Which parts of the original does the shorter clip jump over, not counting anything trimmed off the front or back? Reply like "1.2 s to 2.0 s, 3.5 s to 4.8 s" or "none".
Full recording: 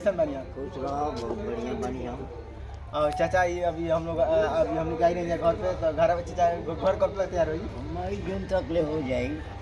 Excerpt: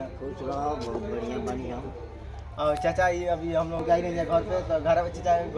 4.1 s to 4.9 s